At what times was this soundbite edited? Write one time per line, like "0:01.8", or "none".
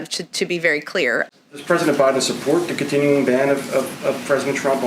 0:01.3

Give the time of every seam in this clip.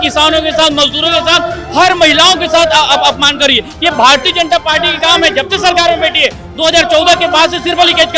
none

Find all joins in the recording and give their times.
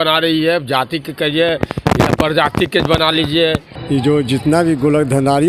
0:03.7

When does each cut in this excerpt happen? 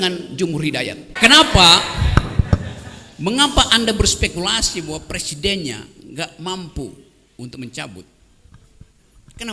0:01.0

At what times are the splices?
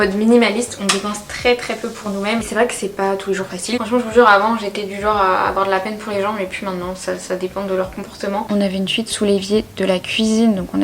0:02.4
0:03.8
0:08.5

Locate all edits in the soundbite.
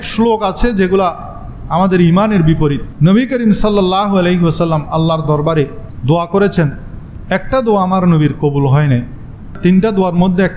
0:02.9

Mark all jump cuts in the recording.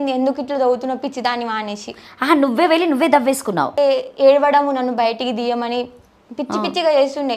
0:03.7

